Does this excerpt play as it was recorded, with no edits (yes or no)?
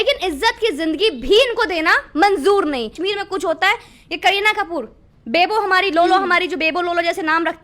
no